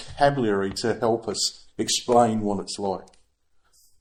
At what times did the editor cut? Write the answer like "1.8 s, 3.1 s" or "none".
none